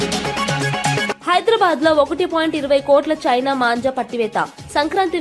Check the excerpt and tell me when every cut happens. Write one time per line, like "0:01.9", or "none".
none